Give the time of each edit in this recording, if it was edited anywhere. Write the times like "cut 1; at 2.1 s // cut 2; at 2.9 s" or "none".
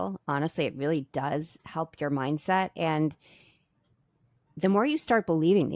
none